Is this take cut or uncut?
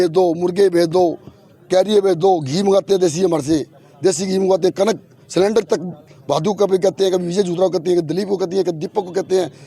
uncut